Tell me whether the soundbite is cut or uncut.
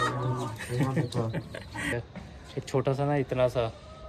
cut